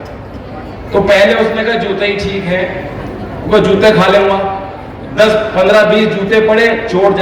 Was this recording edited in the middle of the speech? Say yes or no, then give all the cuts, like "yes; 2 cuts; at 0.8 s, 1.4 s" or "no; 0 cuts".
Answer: no; 0 cuts